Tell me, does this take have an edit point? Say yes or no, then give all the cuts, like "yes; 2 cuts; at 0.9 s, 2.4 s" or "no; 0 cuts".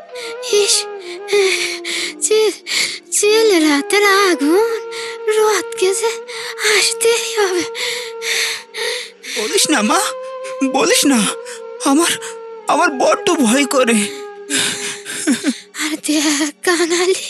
yes; 1 cut; at 15.7 s